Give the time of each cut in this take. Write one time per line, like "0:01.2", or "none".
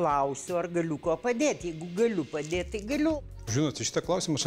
0:03.2